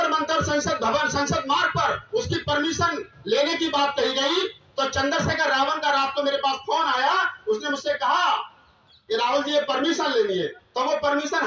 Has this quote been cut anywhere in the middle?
no; 0 cuts

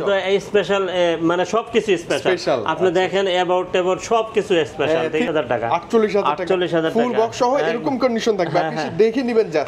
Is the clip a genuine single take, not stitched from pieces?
no; 1 cut; at 5.3 s

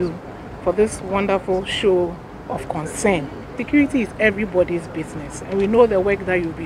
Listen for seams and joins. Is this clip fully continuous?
no; 1 cut; at 3.5 s

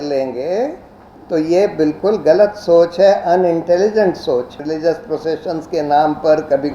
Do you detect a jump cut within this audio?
yes; 1 cut; at 4.6 s

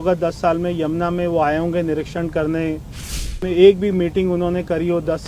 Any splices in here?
yes; 1 cut; at 3.4 s

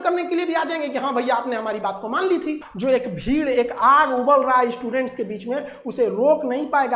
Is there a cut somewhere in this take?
no; 0 cuts

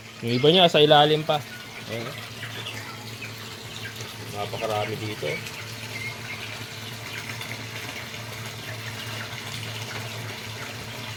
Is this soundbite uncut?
yes; 0 cuts

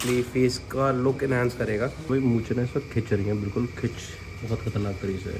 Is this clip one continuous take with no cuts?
no; 1 cut; at 2.1 s

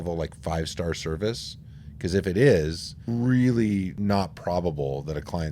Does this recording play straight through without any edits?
no; 2 cuts; at 3.0 s, 3.9 s

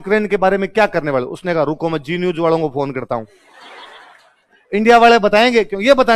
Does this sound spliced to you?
no; 0 cuts

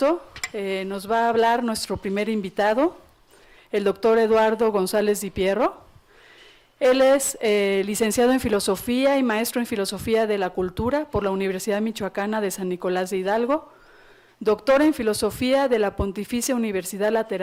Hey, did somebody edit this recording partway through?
no; 0 cuts

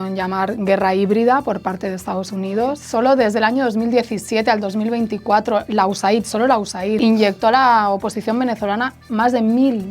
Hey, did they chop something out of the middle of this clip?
yes; 2 cuts; at 2.8 s, 7.0 s

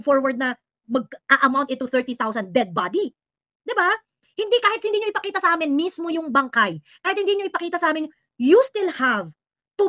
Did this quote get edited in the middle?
no; 0 cuts

